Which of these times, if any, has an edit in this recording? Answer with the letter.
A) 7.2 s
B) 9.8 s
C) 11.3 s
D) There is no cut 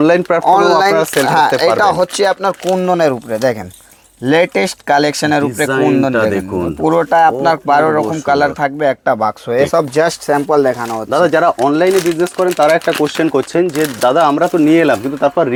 D